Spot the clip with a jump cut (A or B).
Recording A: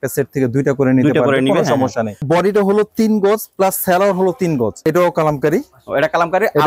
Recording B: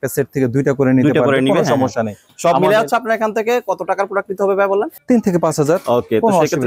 A